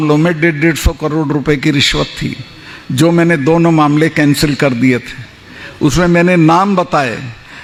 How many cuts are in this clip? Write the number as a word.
zero